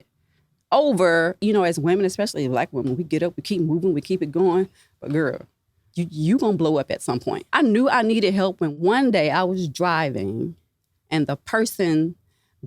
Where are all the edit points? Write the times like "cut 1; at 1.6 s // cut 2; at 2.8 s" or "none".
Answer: cut 1; at 1.4 s // cut 2; at 5.8 s // cut 3; at 7.4 s // cut 4; at 8.7 s